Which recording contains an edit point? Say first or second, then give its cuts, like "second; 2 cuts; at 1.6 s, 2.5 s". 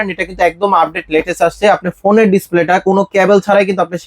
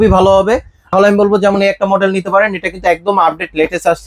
second; 1 cut; at 0.9 s